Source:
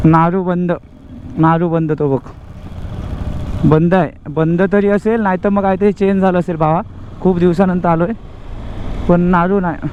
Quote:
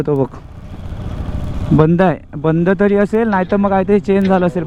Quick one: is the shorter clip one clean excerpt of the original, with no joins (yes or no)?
yes